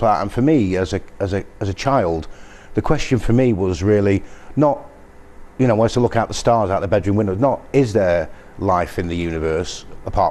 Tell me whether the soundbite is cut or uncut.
cut